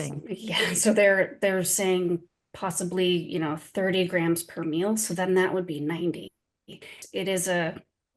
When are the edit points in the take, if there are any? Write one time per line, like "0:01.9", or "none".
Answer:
0:06.9